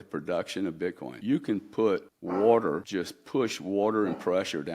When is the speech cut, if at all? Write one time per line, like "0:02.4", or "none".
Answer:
0:01.1
0:02.1
0:02.9

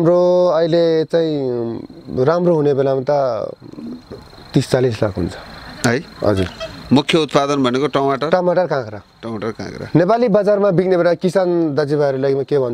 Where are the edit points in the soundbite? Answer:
none

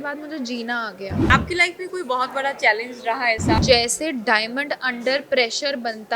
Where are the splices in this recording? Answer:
0:01.2
0:03.6

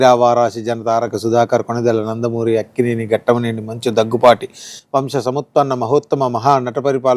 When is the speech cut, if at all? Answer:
none

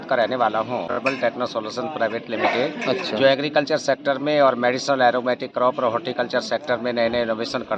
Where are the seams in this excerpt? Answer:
0:01.0

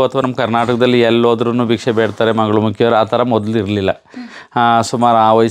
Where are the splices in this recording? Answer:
none

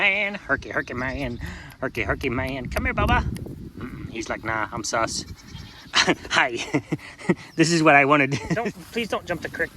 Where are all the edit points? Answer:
0:08.5

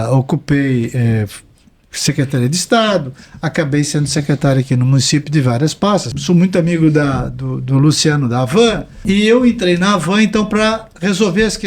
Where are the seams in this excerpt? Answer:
0:06.1
0:08.9

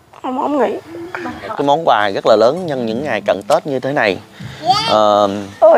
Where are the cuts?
0:01.5

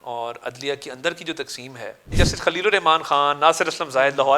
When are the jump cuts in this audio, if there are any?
0:02.1

